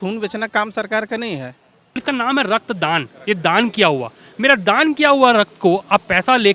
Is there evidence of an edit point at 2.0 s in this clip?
yes; 1 cut; at 2.0 s

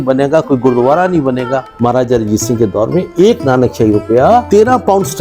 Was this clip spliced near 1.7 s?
yes; 2 cuts; at 1.7 s, 4.5 s

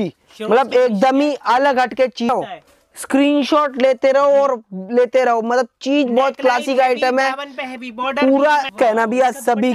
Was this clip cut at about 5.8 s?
no; 2 cuts; at 2.3 s, 8.7 s

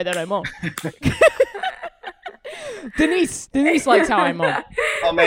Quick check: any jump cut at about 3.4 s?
yes; 1 cut; at 3.4 s

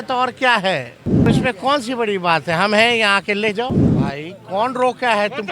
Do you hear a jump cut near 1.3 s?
yes; 2 cuts; at 1.3 s, 3.9 s

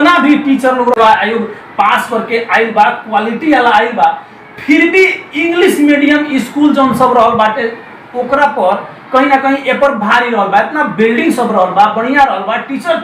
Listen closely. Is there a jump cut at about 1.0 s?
yes; 1 cut; at 1.0 s

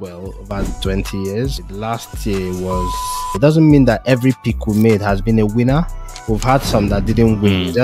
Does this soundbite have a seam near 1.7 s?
yes; 2 cuts; at 1.7 s, 3.3 s

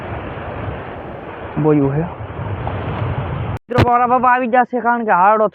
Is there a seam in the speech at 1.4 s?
no; 1 cut; at 3.6 s

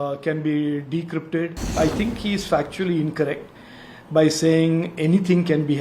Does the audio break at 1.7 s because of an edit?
yes; 1 cut; at 1.7 s

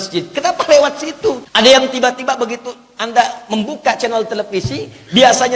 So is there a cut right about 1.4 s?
yes; 1 cut; at 1.4 s

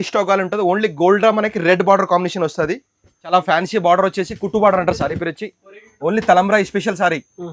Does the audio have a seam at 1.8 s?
no; 1 cut; at 3.3 s

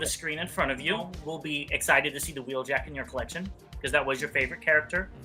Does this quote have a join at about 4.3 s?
no; 1 cut; at 1.2 s

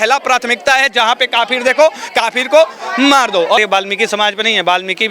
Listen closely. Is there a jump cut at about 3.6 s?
yes; 1 cut; at 3.6 s

